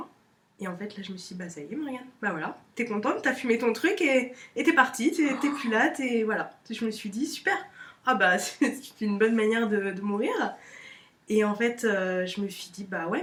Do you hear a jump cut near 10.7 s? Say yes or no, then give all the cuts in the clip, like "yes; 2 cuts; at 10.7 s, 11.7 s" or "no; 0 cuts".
no; 0 cuts